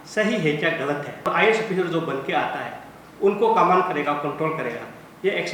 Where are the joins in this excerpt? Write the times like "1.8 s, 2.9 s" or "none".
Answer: 1.2 s